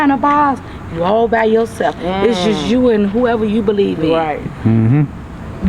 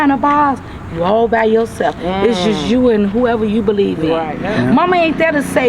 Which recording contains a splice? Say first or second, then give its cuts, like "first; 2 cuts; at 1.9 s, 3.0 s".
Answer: second; 1 cut; at 4.4 s